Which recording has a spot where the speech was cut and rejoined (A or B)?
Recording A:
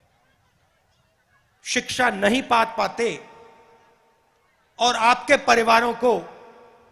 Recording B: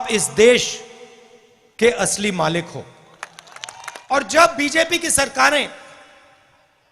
B